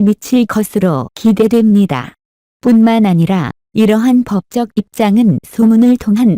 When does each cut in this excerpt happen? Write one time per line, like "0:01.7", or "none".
0:01.1